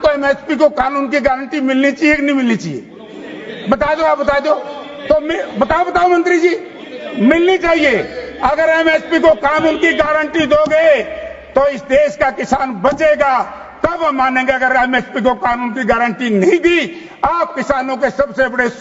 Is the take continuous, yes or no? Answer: yes